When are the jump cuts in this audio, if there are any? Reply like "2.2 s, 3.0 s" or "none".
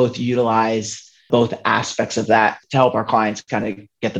1.3 s, 2.6 s